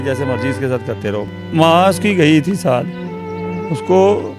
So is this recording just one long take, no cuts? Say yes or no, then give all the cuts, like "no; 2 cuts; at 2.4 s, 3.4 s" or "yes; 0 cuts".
no; 1 cut; at 1.2 s